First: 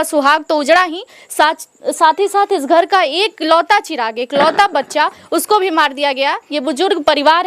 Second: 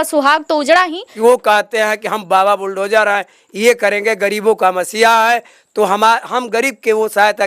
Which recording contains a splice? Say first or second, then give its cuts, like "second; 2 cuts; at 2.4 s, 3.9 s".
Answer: second; 1 cut; at 1.0 s